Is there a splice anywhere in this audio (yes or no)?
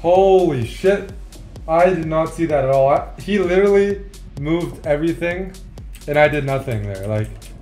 no